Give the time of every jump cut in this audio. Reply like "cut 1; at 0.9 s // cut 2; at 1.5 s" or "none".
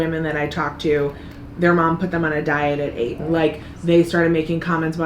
none